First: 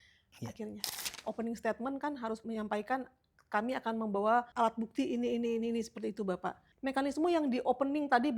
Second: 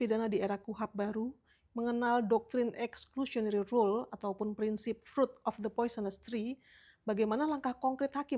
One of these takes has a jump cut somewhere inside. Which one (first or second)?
first